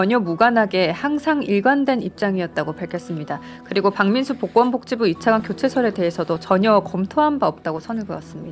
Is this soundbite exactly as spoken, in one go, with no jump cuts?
yes; 0 cuts

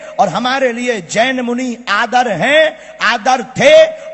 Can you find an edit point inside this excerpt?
no; 0 cuts

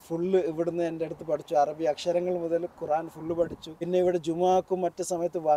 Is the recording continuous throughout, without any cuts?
no; 1 cut; at 3.7 s

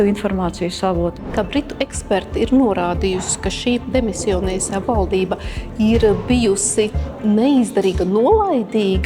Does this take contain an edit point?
yes; 1 cut; at 1.3 s

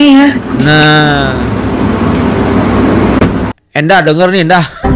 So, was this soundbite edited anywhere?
no; 0 cuts

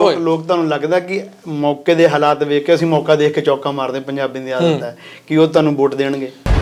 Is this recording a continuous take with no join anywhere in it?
yes; 0 cuts

